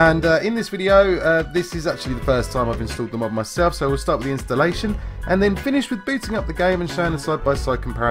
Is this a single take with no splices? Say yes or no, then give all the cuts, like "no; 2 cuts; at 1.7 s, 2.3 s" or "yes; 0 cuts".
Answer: yes; 0 cuts